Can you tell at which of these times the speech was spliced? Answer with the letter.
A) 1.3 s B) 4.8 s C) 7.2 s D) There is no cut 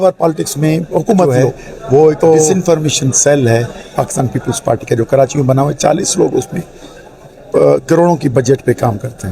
A